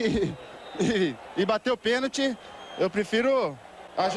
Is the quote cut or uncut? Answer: uncut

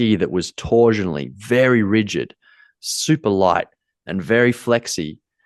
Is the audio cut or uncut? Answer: uncut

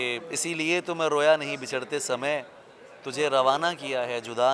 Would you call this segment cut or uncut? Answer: uncut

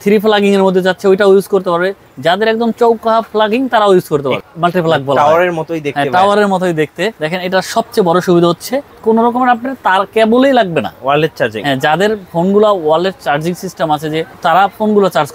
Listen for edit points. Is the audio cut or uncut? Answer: cut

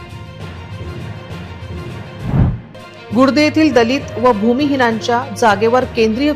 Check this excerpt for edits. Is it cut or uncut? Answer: uncut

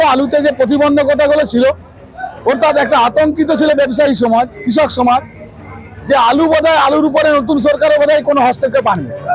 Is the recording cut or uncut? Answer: uncut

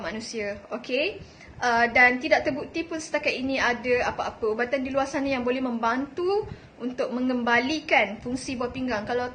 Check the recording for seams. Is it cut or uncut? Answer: uncut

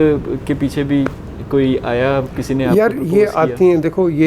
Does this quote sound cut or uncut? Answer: uncut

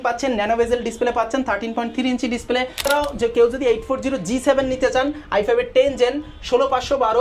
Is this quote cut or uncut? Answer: cut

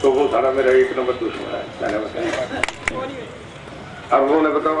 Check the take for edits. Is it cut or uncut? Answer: cut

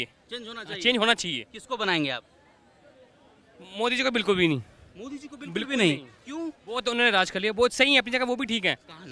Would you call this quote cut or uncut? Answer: uncut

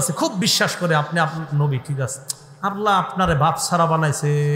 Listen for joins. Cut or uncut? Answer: uncut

